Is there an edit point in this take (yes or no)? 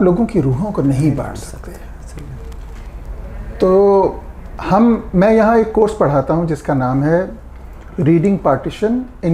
no